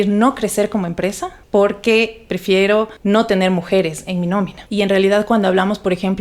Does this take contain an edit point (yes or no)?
yes